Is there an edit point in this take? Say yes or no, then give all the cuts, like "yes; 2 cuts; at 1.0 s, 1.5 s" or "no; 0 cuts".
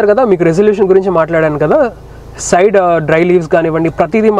no; 0 cuts